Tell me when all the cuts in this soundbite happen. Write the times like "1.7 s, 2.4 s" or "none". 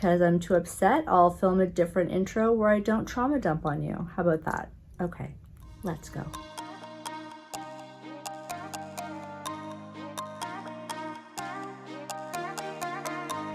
none